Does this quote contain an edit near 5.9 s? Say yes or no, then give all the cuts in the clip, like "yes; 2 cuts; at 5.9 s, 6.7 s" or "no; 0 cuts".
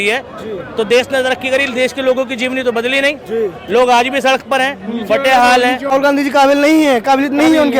yes; 1 cut; at 5.9 s